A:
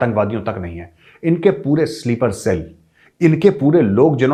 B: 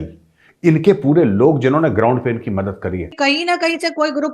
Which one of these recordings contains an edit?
B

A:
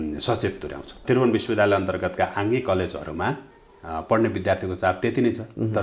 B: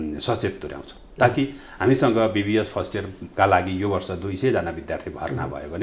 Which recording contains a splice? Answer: A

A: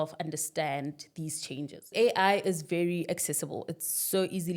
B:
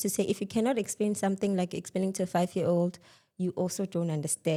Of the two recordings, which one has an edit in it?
A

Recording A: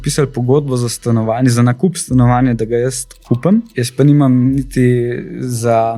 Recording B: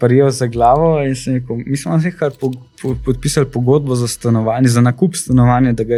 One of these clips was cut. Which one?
A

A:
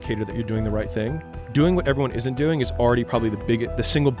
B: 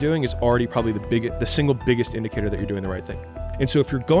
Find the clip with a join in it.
B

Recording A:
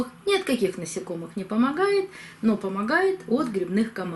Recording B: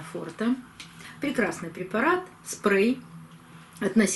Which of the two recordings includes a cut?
B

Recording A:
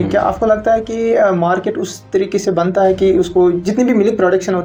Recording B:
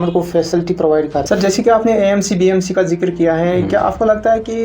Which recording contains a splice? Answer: B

